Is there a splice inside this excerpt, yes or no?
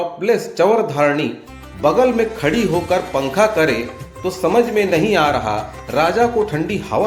no